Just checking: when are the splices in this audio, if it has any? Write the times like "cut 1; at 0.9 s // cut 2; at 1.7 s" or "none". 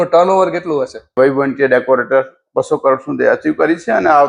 cut 1; at 1.1 s